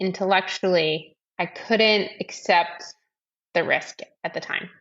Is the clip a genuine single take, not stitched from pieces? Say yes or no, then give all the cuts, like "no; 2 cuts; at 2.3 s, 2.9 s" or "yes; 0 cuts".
no; 1 cut; at 1.2 s